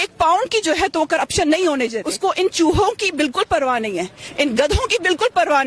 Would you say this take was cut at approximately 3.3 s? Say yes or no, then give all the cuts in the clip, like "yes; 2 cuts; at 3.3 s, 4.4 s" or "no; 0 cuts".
no; 1 cut; at 2.0 s